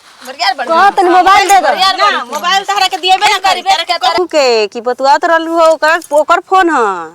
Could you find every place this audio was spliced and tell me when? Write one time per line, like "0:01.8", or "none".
0:04.2